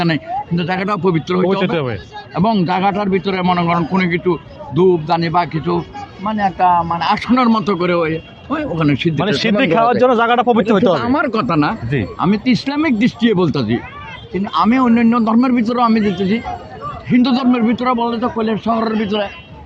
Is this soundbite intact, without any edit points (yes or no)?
yes